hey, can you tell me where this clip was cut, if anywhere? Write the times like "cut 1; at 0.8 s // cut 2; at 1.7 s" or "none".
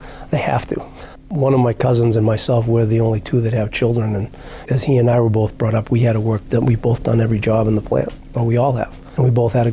none